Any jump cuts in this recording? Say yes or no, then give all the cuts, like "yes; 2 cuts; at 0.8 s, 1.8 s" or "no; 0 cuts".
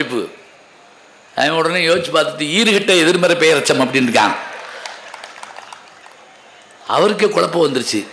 no; 0 cuts